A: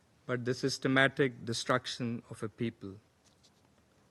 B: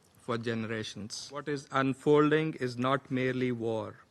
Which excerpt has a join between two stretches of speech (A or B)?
B